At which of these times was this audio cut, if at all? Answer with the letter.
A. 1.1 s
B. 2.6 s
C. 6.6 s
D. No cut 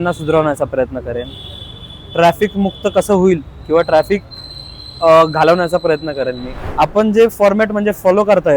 C